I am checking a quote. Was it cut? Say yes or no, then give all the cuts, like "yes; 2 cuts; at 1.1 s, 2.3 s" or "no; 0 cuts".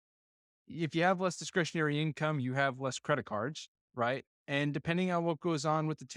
no; 0 cuts